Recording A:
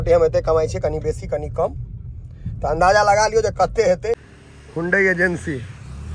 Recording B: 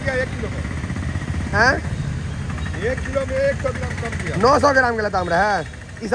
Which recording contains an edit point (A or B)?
A